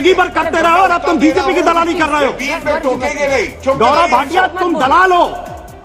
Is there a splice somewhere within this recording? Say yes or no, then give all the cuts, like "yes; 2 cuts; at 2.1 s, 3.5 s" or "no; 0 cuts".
no; 0 cuts